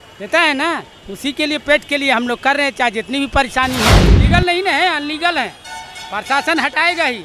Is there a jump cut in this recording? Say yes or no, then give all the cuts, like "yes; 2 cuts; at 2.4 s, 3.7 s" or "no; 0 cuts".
yes; 1 cut; at 4.1 s